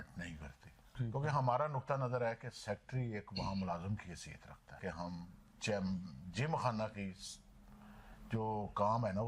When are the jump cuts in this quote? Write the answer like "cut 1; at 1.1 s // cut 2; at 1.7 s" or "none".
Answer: cut 1; at 0.9 s // cut 2; at 4.8 s